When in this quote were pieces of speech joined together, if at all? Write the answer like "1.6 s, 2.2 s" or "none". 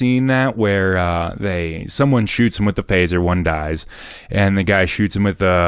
none